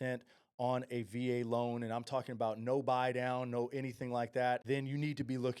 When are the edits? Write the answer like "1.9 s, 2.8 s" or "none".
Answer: 4.6 s